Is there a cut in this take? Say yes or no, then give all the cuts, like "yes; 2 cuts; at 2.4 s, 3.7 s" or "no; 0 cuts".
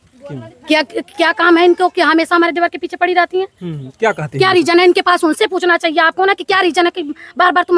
no; 0 cuts